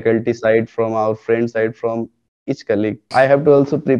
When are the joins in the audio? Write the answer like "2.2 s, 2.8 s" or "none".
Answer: 3.1 s